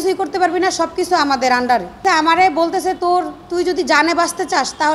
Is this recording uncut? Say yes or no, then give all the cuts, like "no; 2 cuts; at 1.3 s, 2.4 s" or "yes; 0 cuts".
no; 1 cut; at 2.0 s